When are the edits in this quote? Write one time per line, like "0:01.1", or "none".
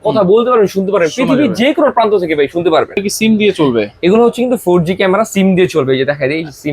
0:03.0